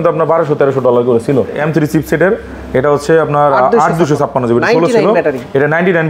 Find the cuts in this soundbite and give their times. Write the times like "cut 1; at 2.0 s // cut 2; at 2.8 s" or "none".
cut 1; at 1.6 s

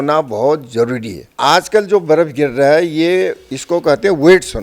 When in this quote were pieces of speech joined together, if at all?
cut 1; at 1.4 s

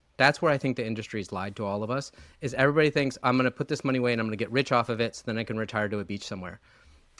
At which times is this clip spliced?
none

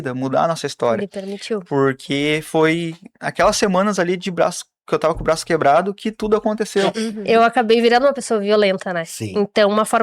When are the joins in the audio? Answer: cut 1; at 7.1 s

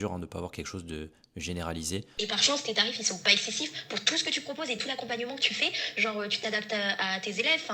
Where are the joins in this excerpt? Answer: cut 1; at 2.1 s

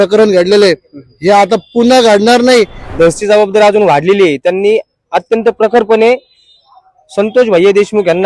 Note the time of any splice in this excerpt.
cut 1; at 2.8 s

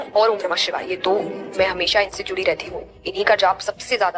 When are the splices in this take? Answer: none

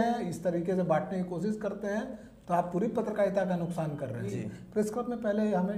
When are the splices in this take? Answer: cut 1; at 4.2 s

